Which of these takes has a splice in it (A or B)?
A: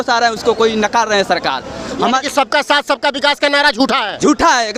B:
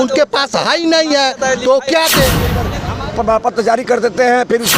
B